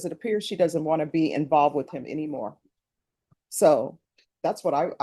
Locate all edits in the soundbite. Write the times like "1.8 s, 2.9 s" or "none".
none